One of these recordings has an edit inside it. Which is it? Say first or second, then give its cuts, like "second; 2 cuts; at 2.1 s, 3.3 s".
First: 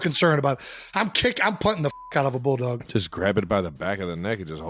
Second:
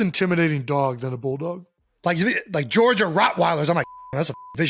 first; 1 cut; at 2.8 s